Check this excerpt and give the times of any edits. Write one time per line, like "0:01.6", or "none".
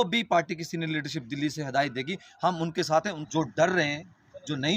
0:03.2